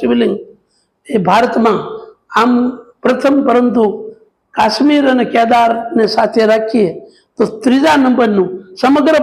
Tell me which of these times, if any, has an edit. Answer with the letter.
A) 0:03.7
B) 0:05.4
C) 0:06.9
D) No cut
D